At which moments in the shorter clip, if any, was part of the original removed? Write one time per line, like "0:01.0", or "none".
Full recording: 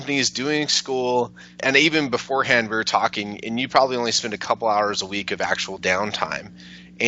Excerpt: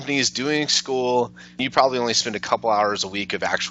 0:01.5